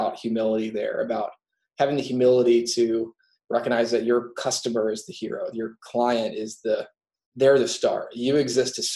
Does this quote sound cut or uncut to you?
uncut